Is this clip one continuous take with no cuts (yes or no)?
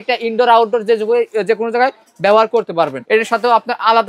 no